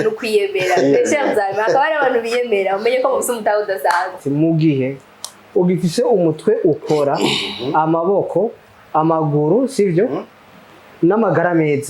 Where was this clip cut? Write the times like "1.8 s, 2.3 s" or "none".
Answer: 4.2 s